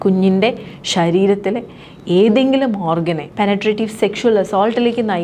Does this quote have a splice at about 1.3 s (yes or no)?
no